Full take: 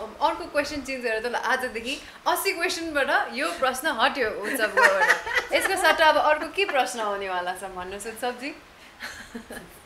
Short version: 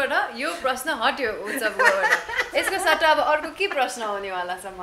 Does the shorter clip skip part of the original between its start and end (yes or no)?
no